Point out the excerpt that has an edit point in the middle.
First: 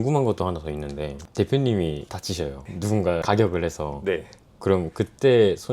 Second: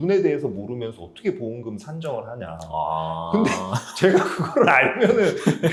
first; 1 cut; at 1.1 s

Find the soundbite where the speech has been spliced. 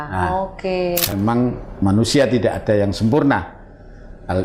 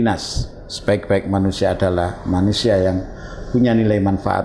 first; 1 cut; at 1.1 s

